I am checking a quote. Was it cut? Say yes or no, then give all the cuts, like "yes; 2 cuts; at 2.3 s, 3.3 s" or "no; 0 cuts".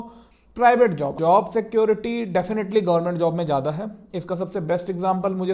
yes; 1 cut; at 1.1 s